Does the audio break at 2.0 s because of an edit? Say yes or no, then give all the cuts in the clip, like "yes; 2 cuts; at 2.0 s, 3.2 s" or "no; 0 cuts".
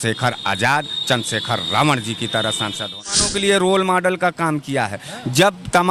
no; 1 cut; at 3.3 s